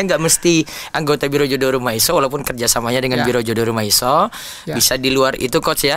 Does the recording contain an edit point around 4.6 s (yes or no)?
no